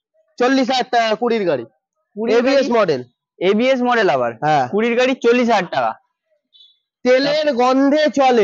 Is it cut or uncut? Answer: uncut